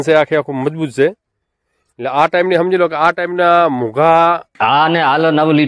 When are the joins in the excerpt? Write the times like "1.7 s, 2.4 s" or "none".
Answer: 4.5 s